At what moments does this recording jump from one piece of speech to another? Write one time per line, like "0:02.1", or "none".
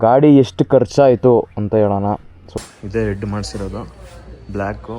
0:02.5